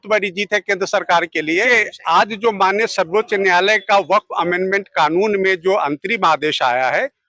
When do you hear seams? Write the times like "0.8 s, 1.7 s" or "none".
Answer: 1.7 s